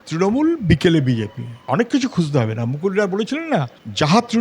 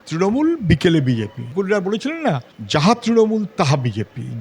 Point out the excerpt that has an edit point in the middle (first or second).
second